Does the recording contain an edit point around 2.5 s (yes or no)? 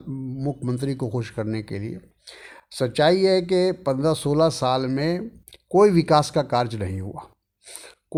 no